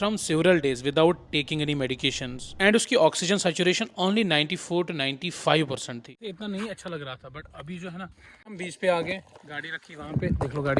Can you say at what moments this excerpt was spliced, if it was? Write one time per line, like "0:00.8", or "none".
0:06.1
0:08.6